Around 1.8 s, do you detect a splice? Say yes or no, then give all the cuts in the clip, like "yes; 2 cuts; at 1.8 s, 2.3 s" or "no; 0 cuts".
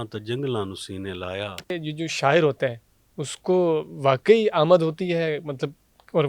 yes; 1 cut; at 1.8 s